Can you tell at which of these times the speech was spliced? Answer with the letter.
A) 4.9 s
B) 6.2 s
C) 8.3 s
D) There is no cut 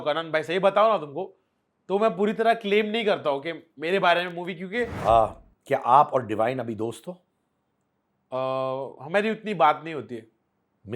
A